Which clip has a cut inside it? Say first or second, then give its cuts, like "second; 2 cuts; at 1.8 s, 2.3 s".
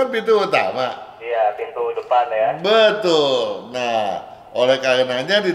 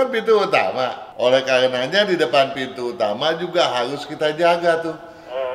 second; 1 cut; at 1.0 s